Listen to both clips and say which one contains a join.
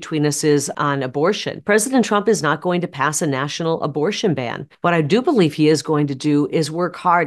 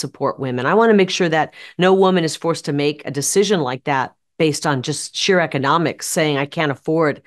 first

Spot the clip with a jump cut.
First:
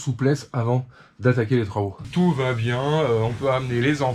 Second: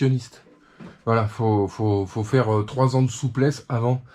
first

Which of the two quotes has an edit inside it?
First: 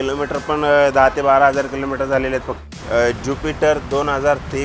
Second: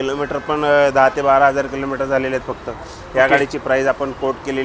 first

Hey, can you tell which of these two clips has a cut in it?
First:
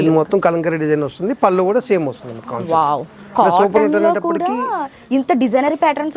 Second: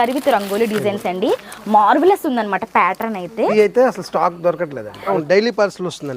second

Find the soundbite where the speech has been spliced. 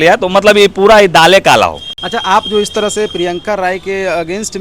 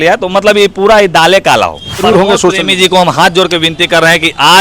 second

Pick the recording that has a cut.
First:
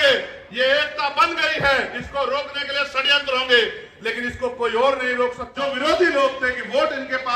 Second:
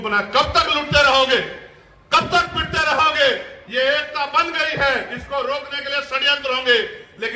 first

